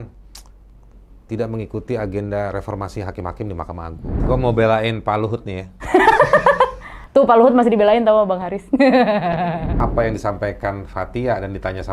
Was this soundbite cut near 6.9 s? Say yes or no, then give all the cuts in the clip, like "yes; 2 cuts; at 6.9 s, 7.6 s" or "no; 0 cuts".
no; 2 cuts; at 4.2 s, 9.8 s